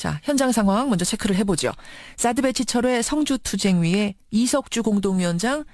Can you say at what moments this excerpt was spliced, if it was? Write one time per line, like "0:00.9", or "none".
0:04.0